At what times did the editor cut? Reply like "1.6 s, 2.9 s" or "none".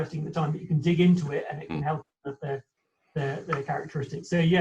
none